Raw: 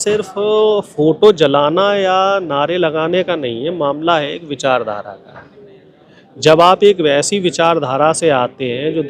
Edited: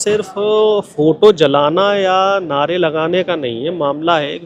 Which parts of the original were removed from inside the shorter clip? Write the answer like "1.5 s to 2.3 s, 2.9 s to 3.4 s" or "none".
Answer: none